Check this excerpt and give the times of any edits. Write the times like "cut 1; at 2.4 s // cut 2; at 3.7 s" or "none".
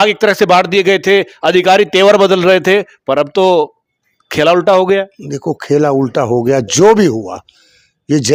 none